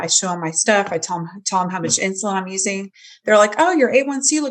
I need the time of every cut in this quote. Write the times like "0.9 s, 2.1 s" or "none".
none